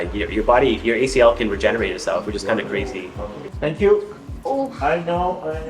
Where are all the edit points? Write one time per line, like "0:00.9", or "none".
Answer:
0:03.4